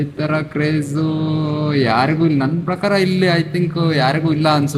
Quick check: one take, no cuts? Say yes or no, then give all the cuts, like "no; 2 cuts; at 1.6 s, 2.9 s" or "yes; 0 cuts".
yes; 0 cuts